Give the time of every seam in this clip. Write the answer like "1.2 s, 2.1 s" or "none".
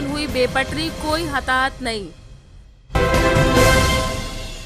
2.7 s